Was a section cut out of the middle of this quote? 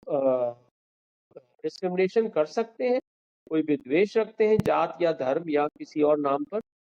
no; 0 cuts

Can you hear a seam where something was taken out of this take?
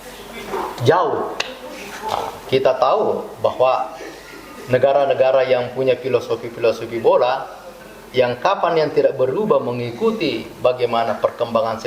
no; 0 cuts

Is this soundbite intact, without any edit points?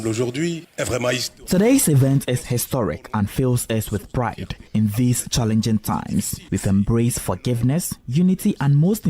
no; 3 cuts; at 4.5 s, 6.4 s, 8.0 s

